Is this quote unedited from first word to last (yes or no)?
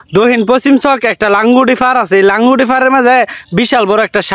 yes